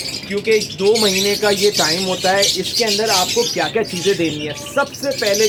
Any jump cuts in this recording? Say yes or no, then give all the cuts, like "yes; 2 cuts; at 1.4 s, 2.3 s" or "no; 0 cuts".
no; 0 cuts